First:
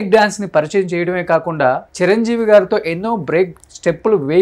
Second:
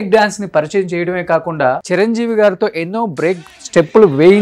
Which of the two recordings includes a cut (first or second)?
second